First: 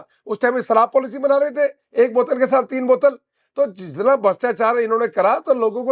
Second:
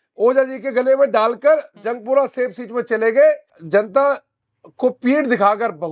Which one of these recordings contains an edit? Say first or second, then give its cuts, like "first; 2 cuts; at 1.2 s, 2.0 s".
second; 1 cut; at 3.5 s